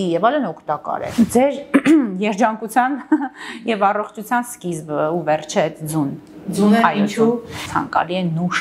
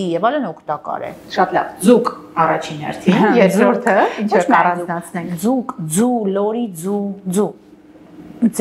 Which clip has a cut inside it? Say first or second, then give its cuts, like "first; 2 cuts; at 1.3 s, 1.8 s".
first; 2 cuts; at 1.0 s, 7.6 s